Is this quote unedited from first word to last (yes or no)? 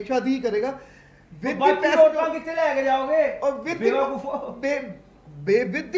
yes